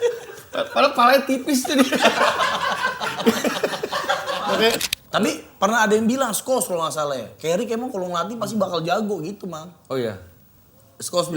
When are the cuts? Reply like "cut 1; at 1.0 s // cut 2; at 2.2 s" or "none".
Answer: cut 1; at 4.9 s